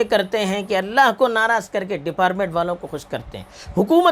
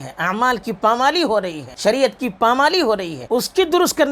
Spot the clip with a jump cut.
second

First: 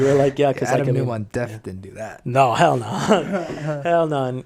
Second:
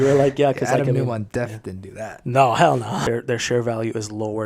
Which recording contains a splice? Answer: second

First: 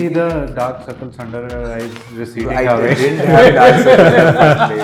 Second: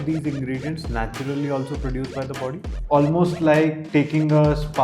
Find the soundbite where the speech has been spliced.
second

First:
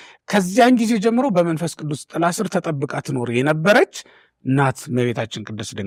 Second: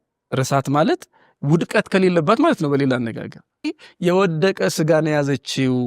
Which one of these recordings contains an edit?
second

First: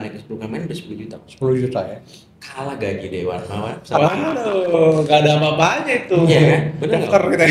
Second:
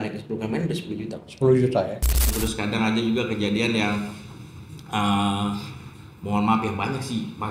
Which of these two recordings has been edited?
second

